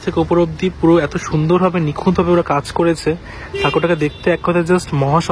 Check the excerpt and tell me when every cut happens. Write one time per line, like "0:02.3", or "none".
none